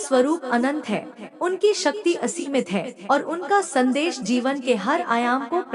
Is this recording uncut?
yes; 0 cuts

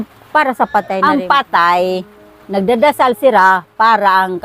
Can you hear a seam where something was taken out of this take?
yes; 1 cut; at 1.0 s

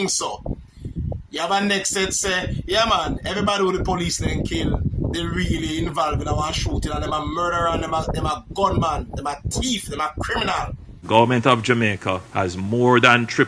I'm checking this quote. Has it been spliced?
yes; 1 cut; at 10.9 s

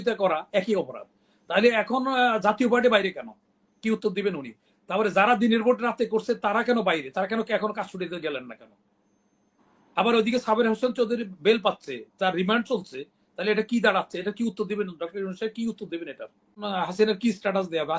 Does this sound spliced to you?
yes; 1 cut; at 16.6 s

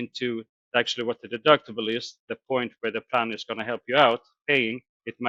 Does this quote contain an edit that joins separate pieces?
no; 0 cuts

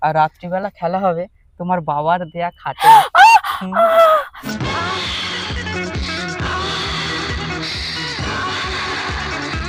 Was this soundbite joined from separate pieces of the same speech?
no; 0 cuts

